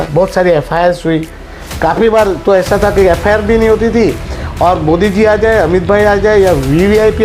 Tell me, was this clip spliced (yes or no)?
no